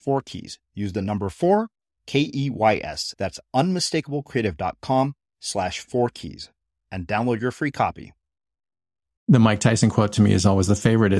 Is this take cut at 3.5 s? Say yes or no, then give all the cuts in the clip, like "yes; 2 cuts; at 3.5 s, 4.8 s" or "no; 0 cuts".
no; 1 cut; at 9.2 s